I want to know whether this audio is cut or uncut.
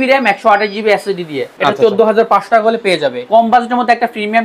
cut